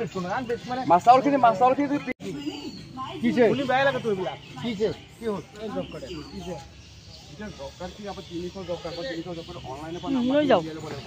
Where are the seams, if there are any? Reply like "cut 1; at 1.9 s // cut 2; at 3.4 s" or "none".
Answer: cut 1; at 2.2 s